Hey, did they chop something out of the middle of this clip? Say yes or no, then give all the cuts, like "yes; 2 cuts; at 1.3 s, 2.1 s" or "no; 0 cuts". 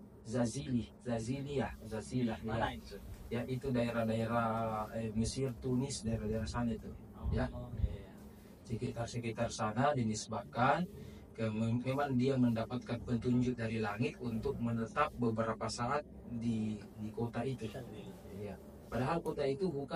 no; 0 cuts